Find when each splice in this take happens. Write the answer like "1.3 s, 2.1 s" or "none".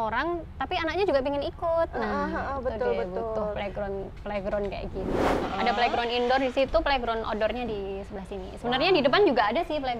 5.3 s